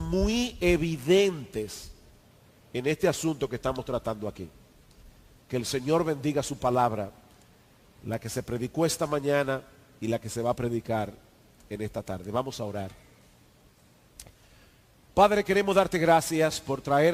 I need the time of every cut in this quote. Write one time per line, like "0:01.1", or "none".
0:12.6